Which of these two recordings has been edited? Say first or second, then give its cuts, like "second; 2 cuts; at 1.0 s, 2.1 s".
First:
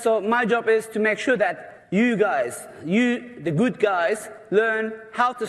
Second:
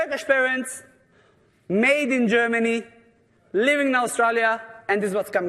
first; 1 cut; at 3.5 s